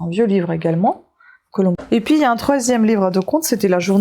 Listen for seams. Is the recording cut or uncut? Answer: cut